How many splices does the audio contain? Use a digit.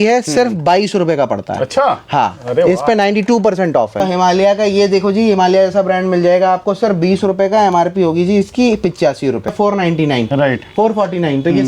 2